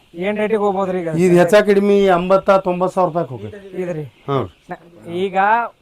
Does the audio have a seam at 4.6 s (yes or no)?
yes